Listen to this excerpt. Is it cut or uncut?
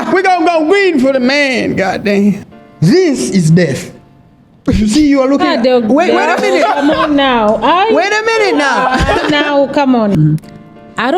cut